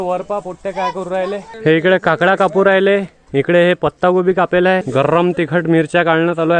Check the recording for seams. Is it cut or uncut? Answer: cut